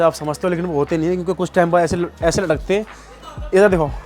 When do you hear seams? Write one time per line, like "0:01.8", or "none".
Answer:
none